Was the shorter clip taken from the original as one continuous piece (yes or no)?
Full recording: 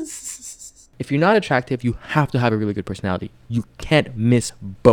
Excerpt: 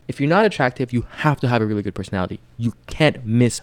yes